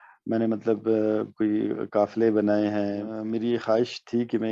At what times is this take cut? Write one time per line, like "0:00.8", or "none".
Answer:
0:03.1